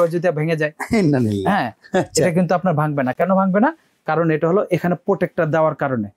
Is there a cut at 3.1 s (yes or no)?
no